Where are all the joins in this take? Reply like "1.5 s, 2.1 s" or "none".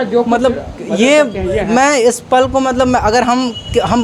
none